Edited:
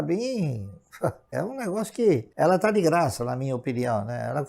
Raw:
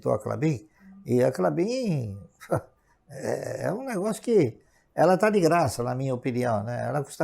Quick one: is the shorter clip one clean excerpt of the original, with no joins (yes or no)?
no